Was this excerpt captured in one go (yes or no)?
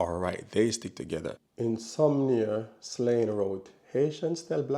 no